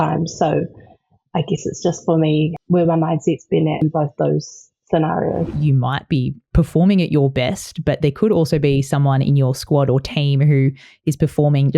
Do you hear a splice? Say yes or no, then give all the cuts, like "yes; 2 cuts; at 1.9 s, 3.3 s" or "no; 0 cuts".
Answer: yes; 3 cuts; at 2.6 s, 3.8 s, 5.5 s